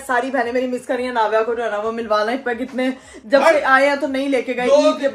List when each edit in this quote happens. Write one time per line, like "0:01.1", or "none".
none